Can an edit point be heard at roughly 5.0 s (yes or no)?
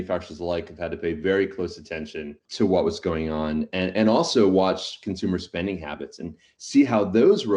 no